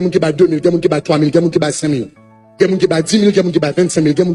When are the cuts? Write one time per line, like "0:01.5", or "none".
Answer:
none